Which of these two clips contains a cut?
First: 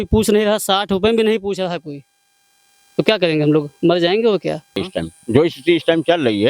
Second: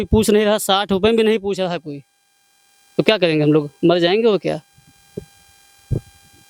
first; 1 cut; at 4.8 s

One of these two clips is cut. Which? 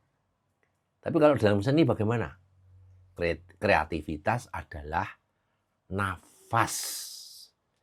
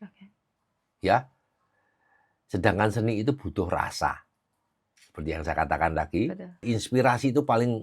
second; 1 cut; at 6.6 s

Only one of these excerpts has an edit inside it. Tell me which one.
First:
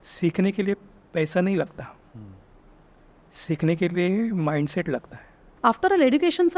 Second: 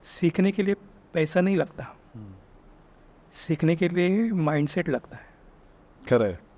first; 1 cut; at 5.5 s

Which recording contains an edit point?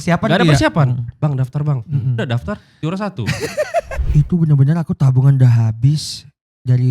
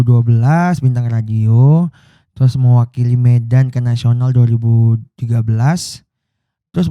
first; 1 cut; at 4.0 s

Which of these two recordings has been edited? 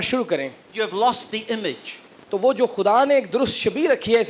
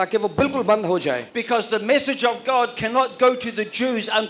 second; 1 cut; at 1.3 s

